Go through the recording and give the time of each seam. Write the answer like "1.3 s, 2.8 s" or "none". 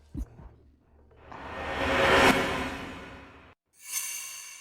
none